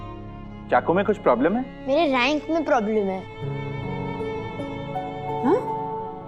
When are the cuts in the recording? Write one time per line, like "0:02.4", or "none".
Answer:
0:01.7